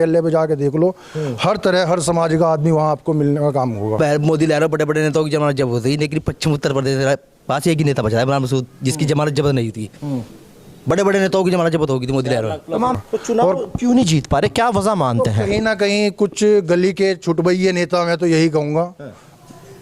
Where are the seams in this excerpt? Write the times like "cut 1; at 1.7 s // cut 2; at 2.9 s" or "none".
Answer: cut 1; at 3.9 s // cut 2; at 12.9 s